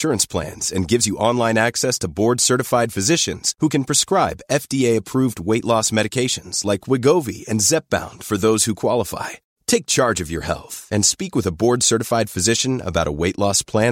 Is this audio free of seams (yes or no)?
yes